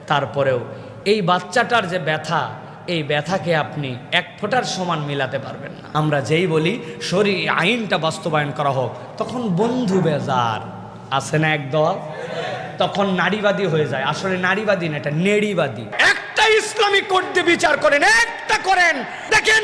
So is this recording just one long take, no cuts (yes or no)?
no